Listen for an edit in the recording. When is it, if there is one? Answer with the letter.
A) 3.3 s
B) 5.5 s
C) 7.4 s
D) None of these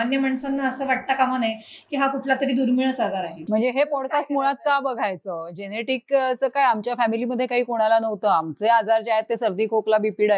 D